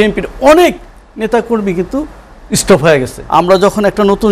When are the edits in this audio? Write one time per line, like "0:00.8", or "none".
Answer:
0:03.2

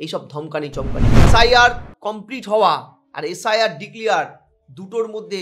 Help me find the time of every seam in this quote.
0:01.2

